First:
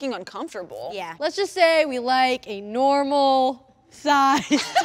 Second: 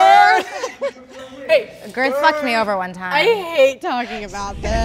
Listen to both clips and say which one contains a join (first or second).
first